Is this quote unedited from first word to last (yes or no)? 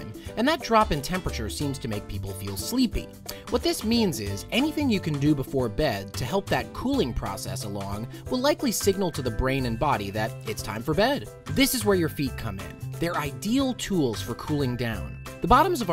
no